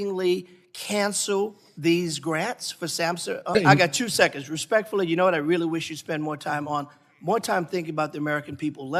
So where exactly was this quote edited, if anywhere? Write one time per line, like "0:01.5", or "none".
0:03.6